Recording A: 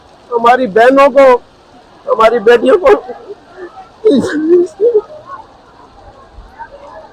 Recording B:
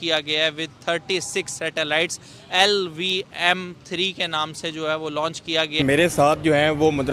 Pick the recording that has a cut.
B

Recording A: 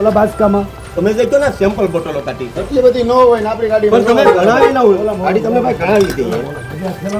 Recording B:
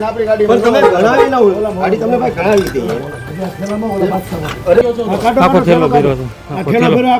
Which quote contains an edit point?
B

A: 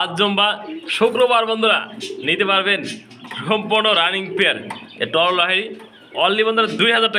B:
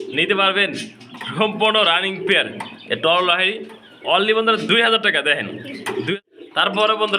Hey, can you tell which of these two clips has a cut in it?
B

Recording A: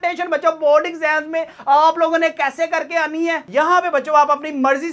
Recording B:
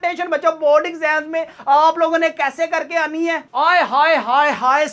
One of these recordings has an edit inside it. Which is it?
A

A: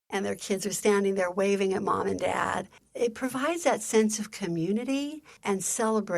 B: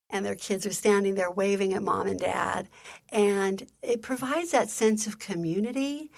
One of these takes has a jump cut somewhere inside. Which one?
A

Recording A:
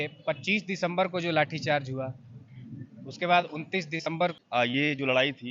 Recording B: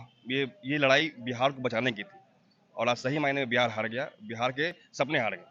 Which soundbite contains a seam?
A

